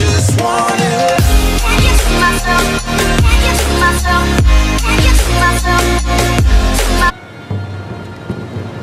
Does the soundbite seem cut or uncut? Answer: uncut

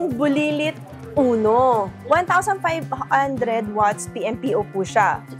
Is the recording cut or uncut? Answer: cut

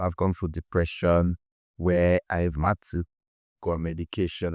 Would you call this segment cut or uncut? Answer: uncut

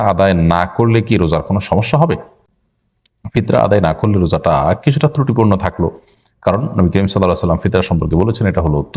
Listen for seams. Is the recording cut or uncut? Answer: uncut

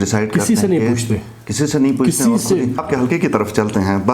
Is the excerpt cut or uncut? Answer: cut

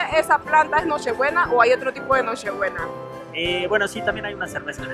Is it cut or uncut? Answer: uncut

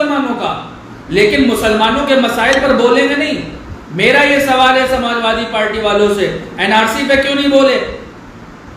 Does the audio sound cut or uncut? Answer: uncut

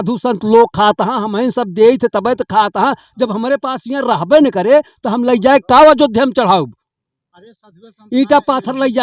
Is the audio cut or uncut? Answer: uncut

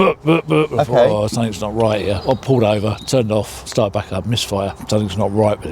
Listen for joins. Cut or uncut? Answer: cut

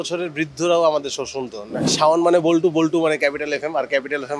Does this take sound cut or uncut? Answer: cut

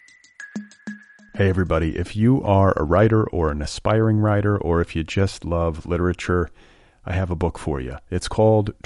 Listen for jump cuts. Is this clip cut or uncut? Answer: cut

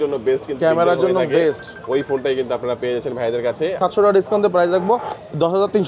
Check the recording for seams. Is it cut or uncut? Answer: cut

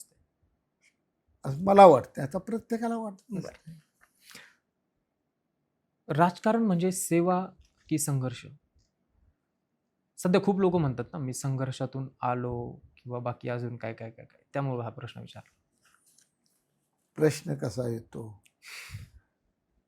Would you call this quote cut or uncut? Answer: uncut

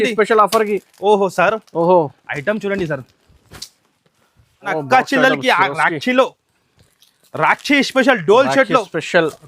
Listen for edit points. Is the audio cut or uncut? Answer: cut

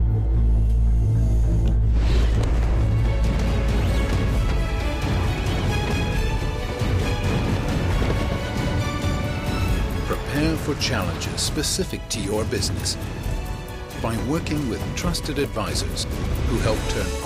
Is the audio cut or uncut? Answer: uncut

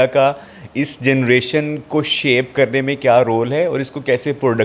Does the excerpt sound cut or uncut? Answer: uncut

